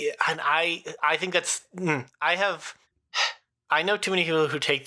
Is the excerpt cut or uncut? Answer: uncut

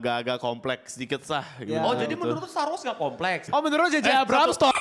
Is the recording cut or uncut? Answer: cut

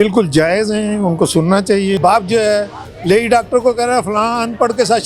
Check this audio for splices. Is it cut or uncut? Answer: cut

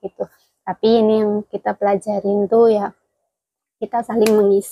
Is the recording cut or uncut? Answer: uncut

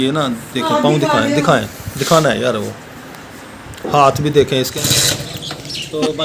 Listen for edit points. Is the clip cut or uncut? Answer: cut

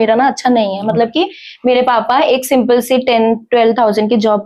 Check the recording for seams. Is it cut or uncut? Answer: uncut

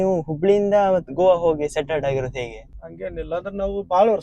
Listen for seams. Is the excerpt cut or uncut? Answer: cut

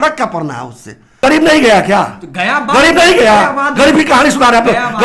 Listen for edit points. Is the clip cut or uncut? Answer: cut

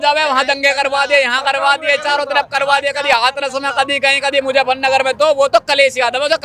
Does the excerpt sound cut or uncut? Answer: uncut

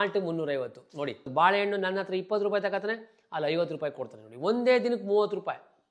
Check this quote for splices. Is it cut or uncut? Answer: cut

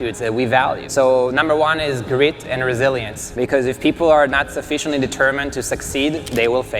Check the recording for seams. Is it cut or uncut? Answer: cut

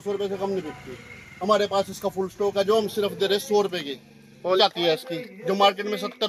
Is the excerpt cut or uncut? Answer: cut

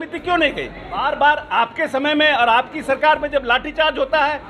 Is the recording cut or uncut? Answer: cut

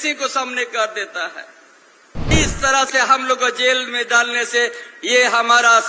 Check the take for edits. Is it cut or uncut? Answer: cut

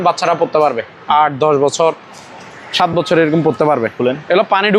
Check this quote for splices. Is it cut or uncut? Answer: uncut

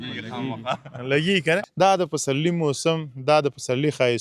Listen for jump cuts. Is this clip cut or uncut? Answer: cut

